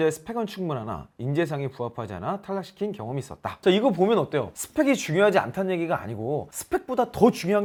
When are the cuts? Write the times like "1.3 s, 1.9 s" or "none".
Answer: none